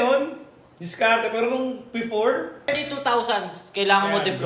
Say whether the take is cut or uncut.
cut